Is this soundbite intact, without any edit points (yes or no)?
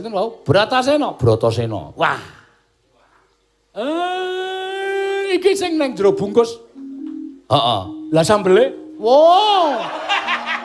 yes